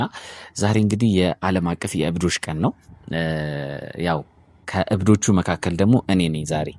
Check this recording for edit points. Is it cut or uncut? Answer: uncut